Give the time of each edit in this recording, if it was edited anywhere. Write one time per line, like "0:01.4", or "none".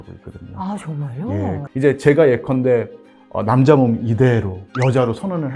0:01.6